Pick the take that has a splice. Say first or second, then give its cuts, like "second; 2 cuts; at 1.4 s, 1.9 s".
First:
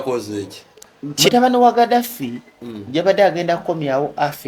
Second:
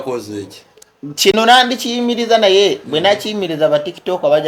first; 1 cut; at 1.3 s